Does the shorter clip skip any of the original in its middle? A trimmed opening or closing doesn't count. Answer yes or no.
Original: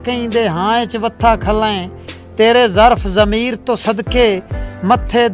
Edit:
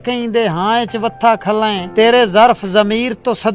yes